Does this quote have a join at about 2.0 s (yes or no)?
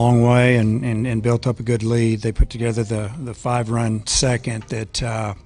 yes